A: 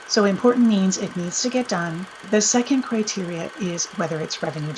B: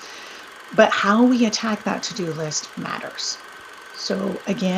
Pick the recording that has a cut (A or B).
A